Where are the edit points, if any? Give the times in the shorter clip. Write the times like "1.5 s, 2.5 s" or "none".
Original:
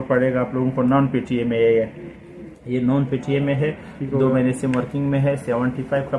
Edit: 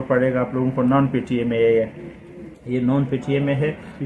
none